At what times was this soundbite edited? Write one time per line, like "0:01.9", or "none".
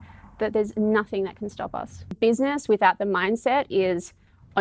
0:02.1